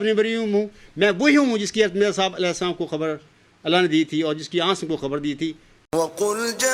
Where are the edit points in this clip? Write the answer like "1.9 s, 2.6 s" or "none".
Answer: 5.8 s